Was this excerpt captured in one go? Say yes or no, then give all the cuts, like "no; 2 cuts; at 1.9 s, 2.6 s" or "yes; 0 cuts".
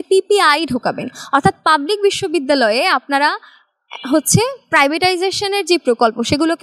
yes; 0 cuts